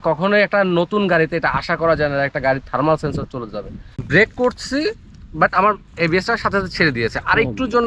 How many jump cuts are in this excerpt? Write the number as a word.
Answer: one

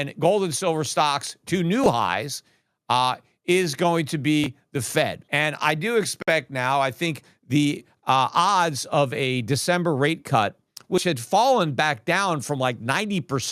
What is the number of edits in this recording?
one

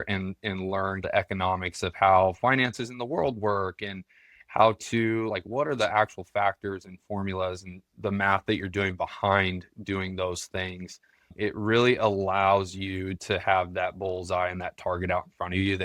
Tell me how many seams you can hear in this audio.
three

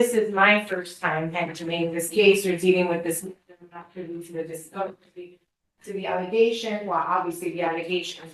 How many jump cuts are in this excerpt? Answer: zero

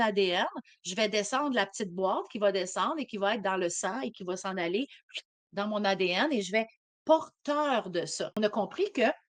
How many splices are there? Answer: one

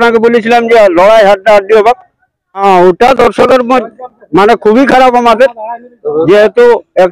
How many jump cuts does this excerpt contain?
one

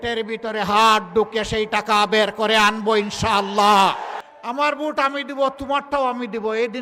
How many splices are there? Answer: one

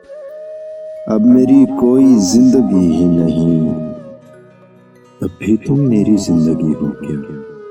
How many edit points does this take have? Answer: zero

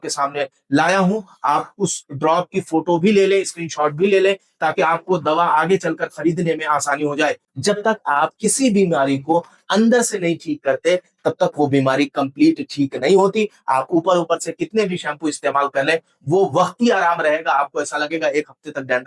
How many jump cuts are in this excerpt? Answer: one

